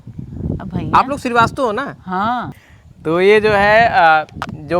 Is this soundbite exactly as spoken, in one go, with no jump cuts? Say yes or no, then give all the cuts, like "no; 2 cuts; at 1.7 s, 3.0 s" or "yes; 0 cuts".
no; 1 cut; at 2.5 s